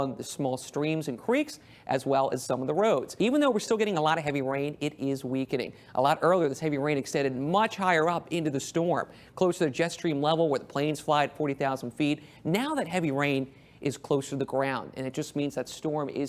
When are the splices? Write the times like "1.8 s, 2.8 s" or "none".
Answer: 3.1 s

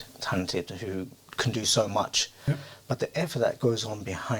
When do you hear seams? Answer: 2.3 s

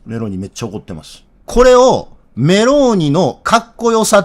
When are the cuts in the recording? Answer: 1.3 s

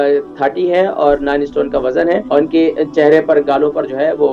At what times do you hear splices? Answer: 2.2 s

